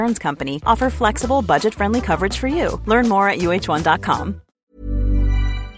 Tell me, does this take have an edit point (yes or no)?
yes